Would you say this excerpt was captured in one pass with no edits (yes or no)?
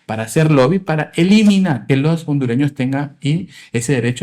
no